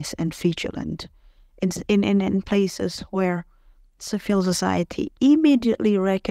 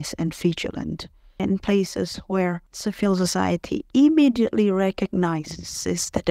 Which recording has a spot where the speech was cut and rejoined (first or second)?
second